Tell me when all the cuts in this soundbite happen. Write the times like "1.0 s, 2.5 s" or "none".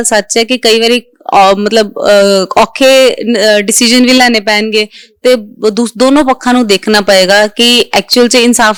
none